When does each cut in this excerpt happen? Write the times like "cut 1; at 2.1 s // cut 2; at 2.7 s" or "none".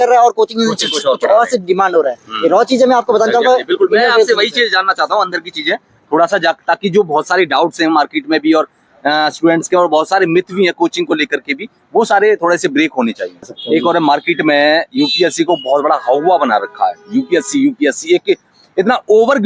cut 1; at 13.6 s